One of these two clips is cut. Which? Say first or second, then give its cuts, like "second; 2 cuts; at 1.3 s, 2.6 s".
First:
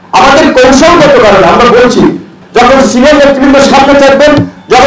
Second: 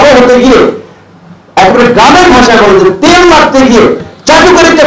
first; 1 cut; at 2.4 s